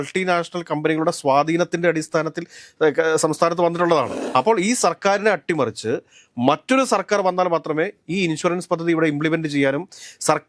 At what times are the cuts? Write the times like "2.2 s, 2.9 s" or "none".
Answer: 4.2 s